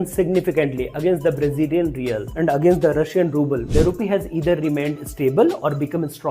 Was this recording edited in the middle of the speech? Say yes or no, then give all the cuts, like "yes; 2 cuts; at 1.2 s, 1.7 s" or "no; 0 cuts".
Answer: yes; 2 cuts; at 2.3 s, 3.7 s